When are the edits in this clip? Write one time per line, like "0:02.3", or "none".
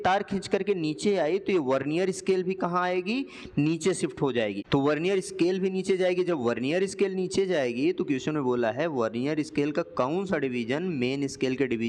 none